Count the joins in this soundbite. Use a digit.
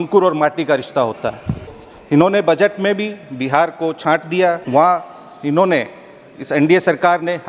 2